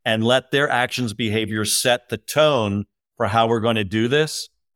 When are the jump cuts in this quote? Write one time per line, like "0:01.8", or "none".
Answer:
none

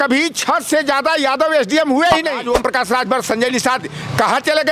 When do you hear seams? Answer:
0:02.4

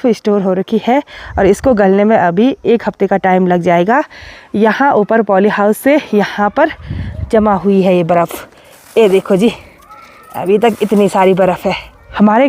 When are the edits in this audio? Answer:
none

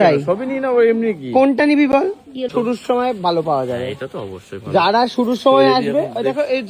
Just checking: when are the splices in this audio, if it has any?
0:02.5

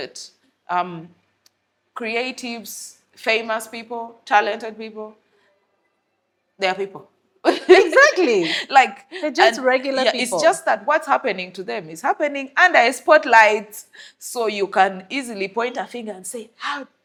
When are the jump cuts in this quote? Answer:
none

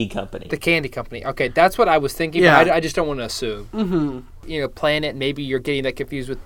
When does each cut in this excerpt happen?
0:04.2

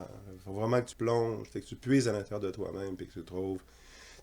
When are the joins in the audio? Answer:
0:00.9

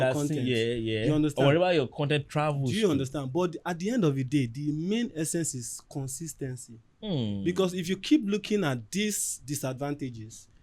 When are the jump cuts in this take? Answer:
none

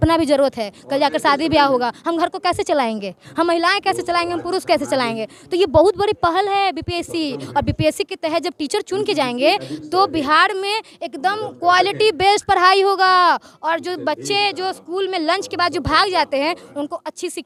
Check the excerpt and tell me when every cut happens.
none

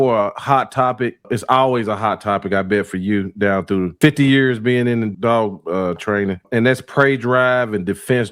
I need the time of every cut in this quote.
0:01.3
0:03.9
0:05.1
0:06.4

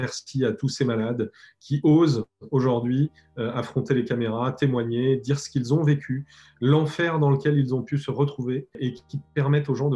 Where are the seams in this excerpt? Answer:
0:08.8

